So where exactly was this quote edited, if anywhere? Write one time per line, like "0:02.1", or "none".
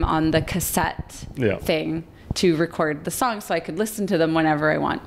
none